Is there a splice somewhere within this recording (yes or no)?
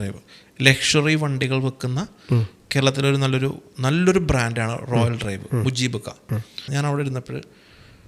yes